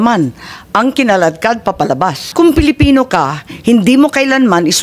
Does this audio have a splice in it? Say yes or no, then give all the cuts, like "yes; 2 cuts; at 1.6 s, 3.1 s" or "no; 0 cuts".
yes; 1 cut; at 2.3 s